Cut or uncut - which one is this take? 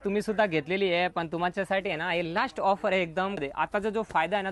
cut